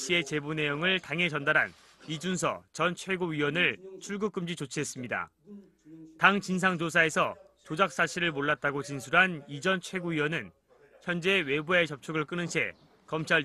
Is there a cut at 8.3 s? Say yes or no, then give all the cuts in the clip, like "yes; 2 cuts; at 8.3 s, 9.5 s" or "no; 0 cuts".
yes; 1 cut; at 8.3 s